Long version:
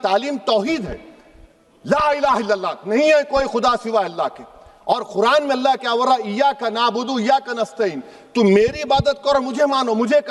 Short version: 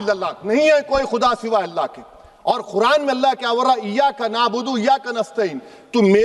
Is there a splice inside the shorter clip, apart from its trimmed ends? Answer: no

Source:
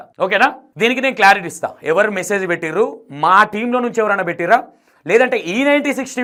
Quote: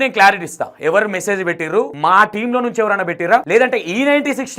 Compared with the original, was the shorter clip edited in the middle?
yes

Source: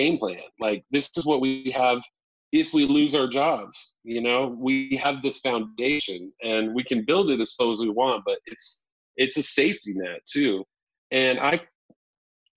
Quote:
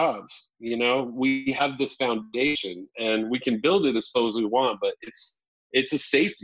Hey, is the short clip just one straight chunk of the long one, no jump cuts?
yes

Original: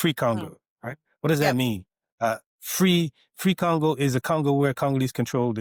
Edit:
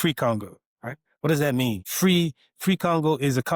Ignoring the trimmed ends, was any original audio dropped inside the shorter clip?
yes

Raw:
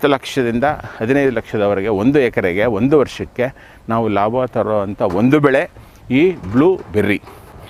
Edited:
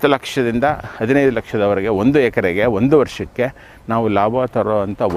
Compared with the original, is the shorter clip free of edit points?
yes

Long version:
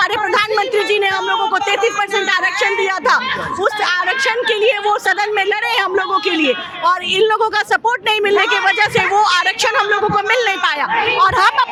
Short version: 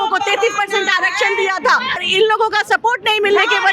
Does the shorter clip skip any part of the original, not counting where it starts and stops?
yes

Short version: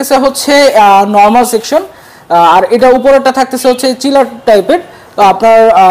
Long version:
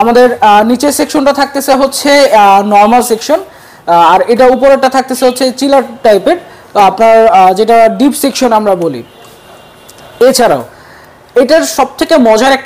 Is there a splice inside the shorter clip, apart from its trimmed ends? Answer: no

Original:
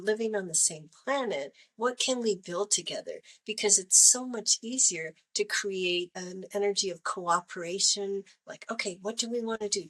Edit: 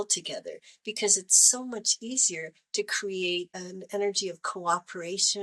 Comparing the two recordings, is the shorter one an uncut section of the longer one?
yes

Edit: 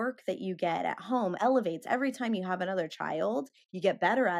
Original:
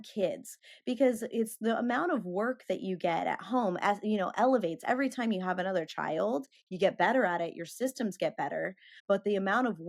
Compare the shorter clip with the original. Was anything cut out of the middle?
yes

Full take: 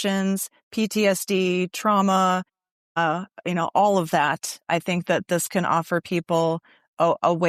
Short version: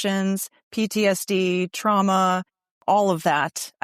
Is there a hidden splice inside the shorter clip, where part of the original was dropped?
yes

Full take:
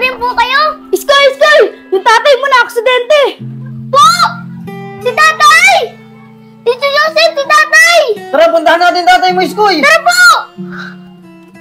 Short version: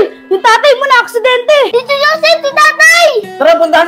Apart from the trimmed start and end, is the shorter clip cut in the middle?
yes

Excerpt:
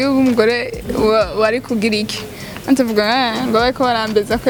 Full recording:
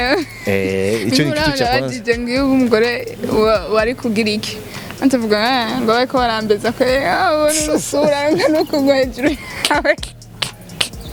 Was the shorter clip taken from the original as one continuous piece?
yes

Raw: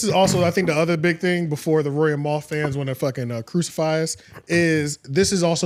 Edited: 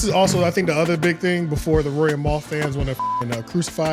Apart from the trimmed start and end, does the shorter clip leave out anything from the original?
no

